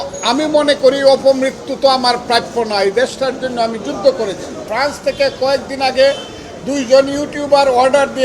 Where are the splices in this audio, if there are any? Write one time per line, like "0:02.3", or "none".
0:04.7